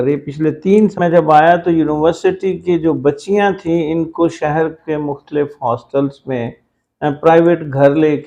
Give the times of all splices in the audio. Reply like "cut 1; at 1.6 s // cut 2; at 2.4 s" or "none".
cut 1; at 1.0 s